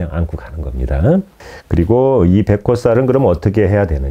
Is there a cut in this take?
no; 0 cuts

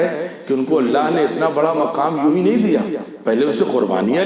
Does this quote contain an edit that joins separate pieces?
no; 0 cuts

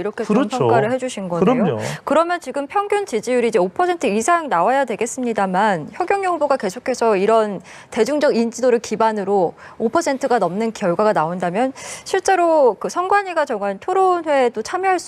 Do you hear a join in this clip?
no; 0 cuts

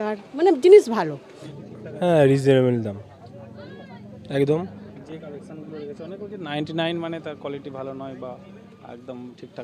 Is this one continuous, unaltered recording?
yes; 0 cuts

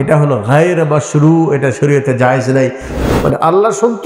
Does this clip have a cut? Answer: yes; 1 cut; at 2.9 s

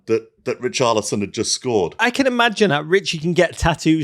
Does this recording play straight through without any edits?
no; 1 cut; at 2.0 s

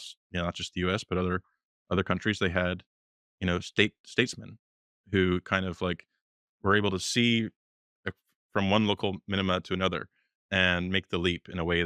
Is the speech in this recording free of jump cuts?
yes; 0 cuts

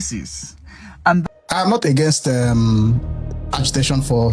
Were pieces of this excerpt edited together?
yes; 1 cut; at 1.2 s

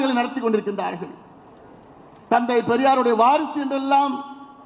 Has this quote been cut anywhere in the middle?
no; 0 cuts

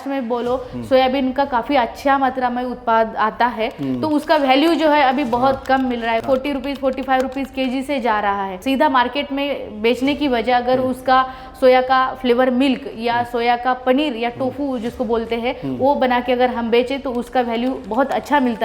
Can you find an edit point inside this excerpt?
yes; 2 cuts; at 6.2 s, 8.6 s

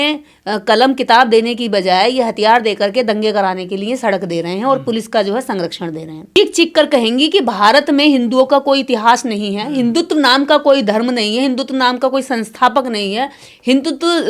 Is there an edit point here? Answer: yes; 1 cut; at 6.4 s

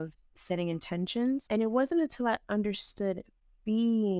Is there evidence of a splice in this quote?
yes; 1 cut; at 1.4 s

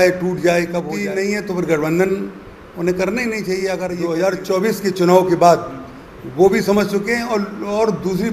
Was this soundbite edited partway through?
yes; 2 cuts; at 0.9 s, 4.0 s

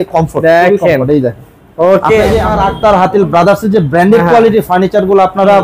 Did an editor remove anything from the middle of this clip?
yes; 1 cut; at 2.5 s

